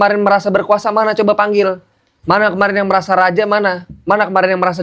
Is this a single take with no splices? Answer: yes; 0 cuts

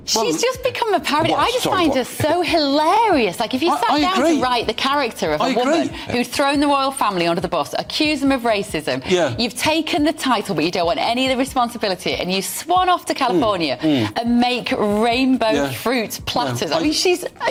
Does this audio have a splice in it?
no; 0 cuts

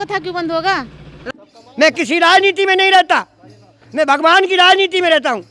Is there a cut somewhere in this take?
yes; 1 cut; at 1.2 s

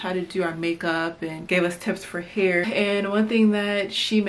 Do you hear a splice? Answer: yes; 2 cuts; at 1.4 s, 2.6 s

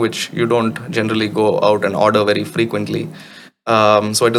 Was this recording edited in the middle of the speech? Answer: no; 0 cuts

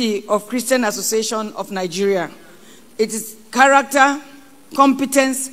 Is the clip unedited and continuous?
yes; 0 cuts

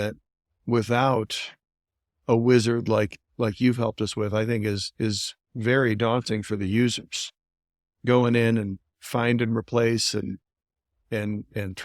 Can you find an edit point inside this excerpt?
no; 0 cuts

